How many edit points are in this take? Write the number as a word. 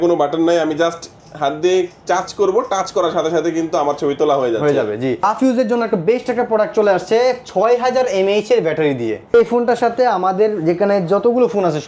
two